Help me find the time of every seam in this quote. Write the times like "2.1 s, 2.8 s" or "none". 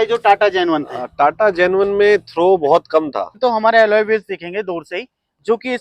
3.3 s